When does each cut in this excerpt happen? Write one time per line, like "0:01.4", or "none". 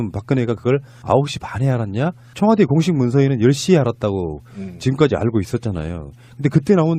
0:02.8